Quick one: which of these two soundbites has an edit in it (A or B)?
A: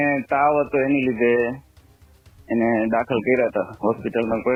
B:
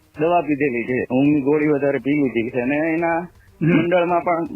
B